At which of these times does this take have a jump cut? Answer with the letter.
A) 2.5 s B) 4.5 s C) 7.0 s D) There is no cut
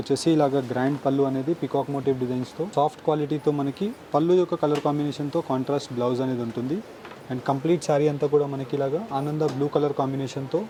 D